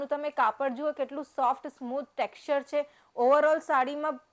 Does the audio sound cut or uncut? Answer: uncut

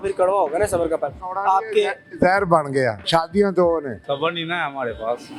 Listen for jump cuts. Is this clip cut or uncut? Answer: cut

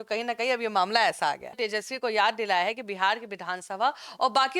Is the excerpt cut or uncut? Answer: cut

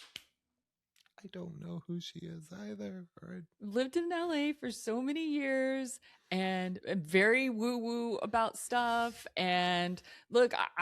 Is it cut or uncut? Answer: cut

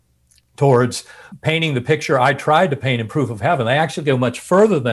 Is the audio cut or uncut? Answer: cut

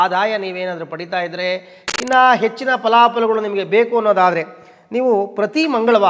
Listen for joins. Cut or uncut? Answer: cut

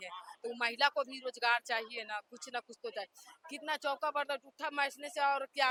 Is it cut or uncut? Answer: uncut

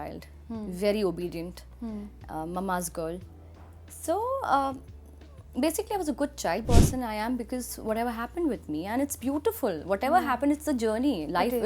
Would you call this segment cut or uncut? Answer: cut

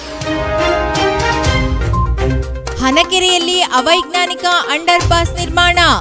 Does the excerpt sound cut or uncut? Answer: cut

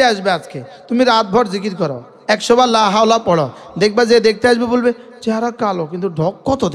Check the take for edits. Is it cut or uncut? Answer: uncut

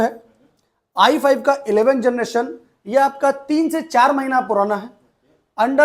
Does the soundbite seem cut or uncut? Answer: uncut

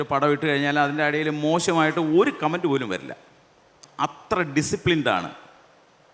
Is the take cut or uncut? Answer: uncut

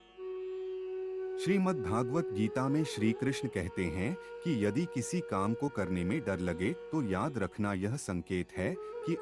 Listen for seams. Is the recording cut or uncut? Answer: cut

